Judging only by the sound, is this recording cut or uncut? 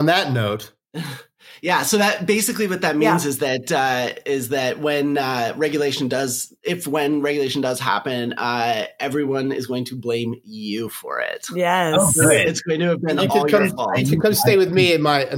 uncut